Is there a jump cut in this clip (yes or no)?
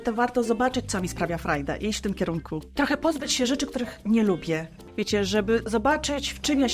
yes